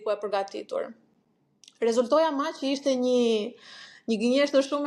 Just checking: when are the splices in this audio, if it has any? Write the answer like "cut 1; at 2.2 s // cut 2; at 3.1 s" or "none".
none

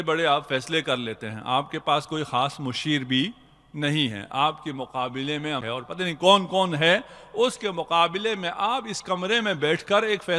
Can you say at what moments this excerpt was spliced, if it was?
cut 1; at 5.6 s

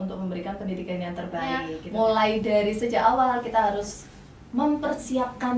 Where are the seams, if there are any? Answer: cut 1; at 1.8 s

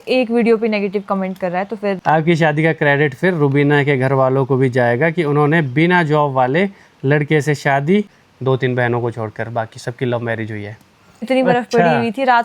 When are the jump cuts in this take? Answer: cut 1; at 2.0 s // cut 2; at 8.2 s // cut 3; at 11.3 s

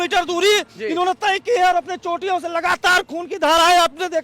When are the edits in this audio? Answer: none

